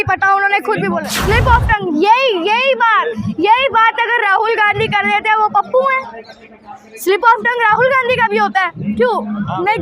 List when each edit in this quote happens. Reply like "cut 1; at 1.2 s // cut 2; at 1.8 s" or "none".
cut 1; at 1.1 s